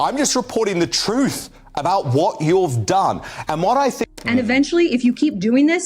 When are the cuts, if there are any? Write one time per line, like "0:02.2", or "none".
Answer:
0:04.0